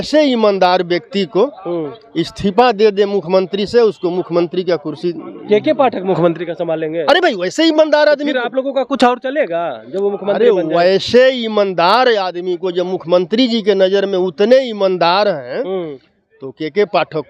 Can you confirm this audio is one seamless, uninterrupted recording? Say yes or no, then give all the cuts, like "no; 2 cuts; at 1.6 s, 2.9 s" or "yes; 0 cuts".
yes; 0 cuts